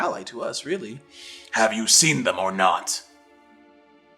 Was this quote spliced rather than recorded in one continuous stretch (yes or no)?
yes